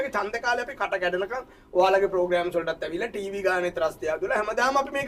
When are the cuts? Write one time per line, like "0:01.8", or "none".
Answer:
none

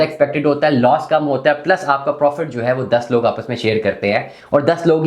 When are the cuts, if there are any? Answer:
none

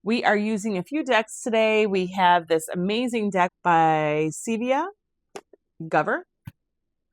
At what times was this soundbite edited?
0:03.2

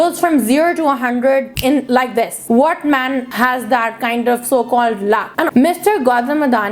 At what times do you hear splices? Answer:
0:05.5

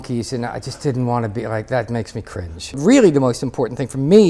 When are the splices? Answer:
0:02.8

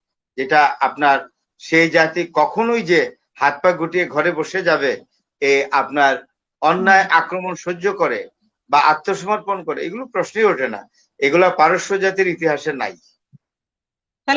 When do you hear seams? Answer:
none

